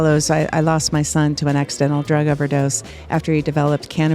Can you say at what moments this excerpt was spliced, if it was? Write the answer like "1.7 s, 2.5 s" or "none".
none